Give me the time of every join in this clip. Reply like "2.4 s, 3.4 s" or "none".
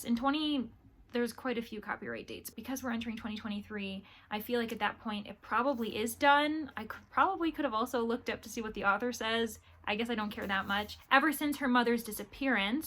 2.5 s, 10.9 s